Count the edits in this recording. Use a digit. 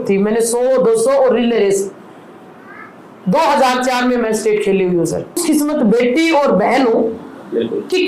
1